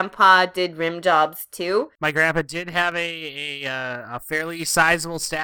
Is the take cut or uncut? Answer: cut